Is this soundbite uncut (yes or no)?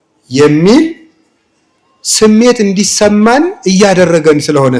yes